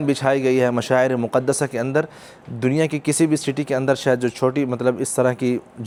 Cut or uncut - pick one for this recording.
uncut